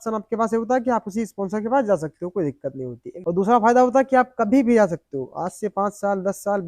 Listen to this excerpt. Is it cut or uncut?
cut